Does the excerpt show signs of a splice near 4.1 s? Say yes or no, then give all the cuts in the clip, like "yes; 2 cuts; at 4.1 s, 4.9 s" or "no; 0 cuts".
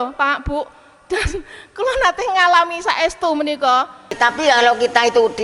yes; 1 cut; at 4.1 s